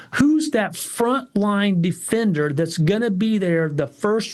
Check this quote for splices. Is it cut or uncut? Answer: uncut